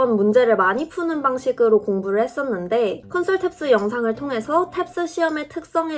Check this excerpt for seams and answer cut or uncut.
uncut